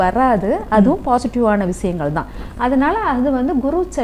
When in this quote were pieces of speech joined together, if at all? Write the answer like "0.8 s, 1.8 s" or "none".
none